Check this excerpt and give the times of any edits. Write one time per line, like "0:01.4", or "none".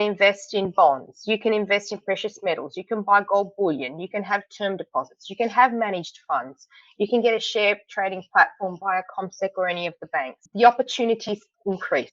none